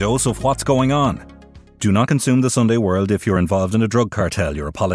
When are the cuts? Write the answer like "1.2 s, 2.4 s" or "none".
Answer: none

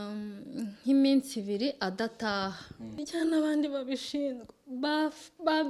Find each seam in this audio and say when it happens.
3.0 s

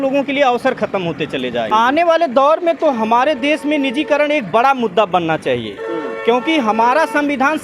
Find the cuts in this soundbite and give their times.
1.7 s

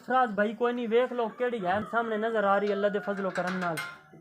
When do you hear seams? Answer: 1.8 s

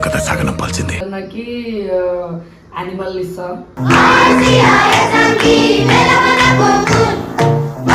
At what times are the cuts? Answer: 1.0 s

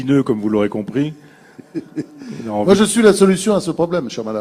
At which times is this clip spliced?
2.7 s

